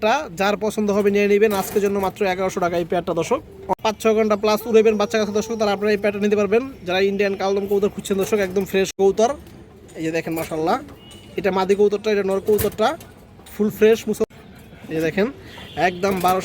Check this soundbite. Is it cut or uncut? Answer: cut